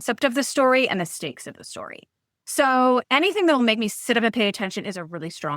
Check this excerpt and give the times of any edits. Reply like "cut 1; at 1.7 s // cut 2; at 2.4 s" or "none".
cut 1; at 3.0 s